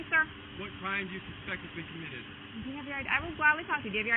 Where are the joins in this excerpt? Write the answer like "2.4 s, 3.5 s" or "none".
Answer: none